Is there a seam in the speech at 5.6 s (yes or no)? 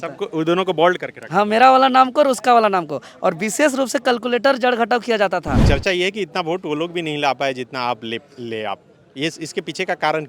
yes